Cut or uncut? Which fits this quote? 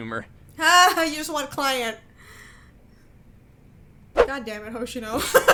uncut